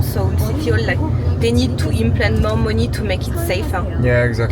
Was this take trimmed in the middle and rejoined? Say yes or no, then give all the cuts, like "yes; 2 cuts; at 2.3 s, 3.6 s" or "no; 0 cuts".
no; 0 cuts